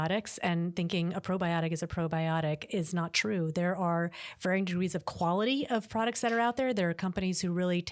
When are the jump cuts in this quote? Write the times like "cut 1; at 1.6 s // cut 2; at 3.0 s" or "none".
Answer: none